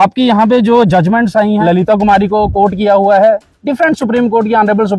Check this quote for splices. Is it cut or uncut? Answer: cut